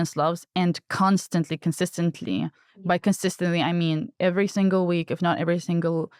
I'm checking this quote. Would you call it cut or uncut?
uncut